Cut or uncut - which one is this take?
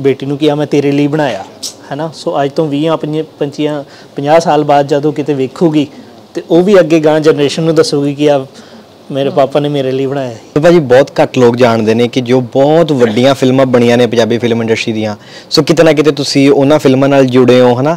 cut